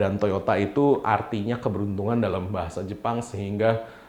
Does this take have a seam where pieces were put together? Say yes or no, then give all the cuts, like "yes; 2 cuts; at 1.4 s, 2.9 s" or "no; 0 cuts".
no; 0 cuts